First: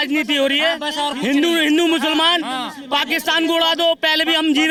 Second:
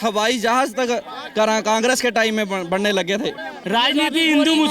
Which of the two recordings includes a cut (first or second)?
second